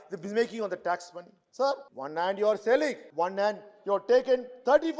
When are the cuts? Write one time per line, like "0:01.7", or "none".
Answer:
0:01.9
0:03.0